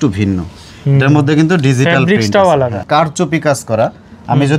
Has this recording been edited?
yes; 1 cut; at 2.8 s

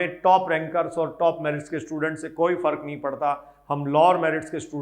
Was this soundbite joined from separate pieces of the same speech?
no; 0 cuts

